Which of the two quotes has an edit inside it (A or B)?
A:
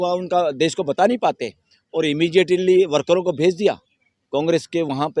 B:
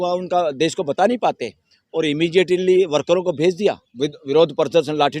B